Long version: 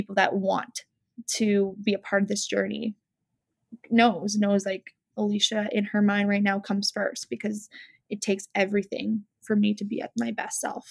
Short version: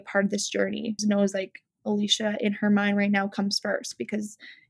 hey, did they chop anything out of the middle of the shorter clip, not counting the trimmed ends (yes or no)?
yes